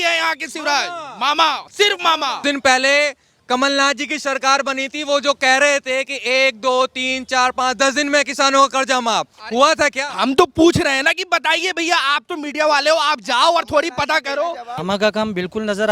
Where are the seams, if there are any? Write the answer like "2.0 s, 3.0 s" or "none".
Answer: 2.4 s, 14.7 s